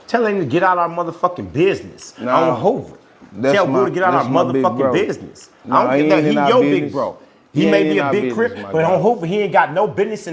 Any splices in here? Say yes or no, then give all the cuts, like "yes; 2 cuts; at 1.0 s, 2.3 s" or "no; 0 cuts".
no; 0 cuts